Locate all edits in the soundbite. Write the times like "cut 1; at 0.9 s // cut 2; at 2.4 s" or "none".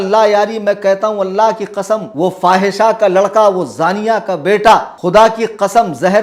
cut 1; at 2.1 s // cut 2; at 4.9 s